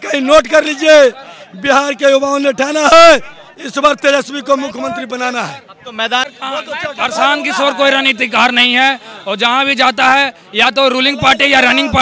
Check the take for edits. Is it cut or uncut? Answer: cut